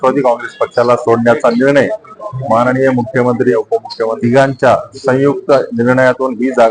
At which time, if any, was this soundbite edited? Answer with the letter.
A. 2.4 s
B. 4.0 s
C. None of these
B